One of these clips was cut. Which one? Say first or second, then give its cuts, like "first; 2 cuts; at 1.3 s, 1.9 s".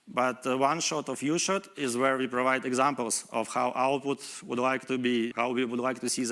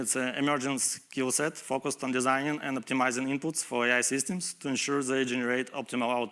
first; 1 cut; at 5.3 s